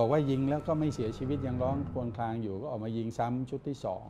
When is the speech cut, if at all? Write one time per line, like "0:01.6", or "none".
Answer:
none